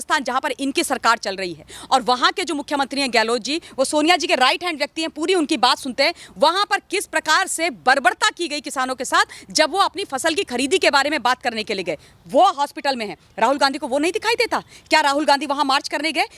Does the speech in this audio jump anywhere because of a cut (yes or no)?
no